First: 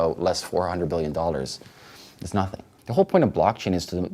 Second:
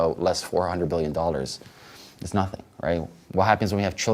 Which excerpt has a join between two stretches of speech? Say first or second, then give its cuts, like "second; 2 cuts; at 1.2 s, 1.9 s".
first; 1 cut; at 2.7 s